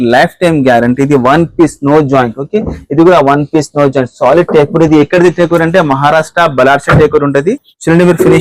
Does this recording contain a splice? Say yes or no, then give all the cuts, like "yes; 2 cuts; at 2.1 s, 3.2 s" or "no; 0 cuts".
no; 0 cuts